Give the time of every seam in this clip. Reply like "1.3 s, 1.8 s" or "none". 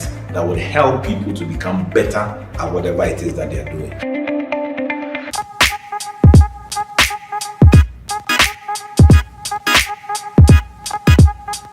5.3 s